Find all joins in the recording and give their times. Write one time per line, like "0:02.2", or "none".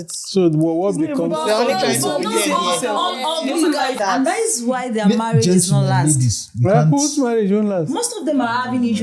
0:04.0